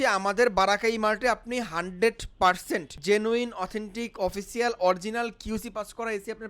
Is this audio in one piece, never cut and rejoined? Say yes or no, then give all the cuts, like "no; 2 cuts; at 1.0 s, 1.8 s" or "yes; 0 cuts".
no; 1 cut; at 2.9 s